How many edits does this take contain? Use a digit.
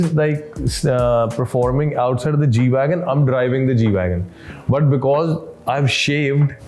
0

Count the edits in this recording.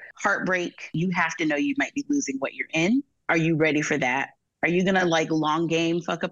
2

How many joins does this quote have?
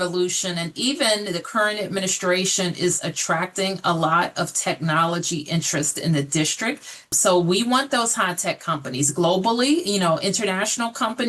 1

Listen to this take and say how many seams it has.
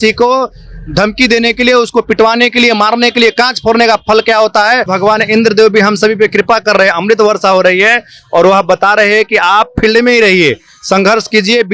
1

